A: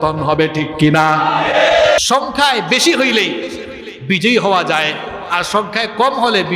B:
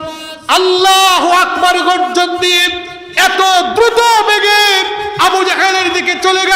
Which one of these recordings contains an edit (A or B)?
A